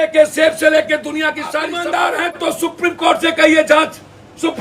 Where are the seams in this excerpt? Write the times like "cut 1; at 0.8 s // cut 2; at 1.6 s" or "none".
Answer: cut 1; at 1.7 s